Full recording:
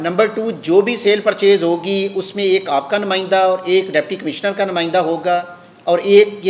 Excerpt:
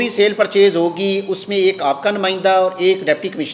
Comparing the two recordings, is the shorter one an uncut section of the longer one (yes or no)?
yes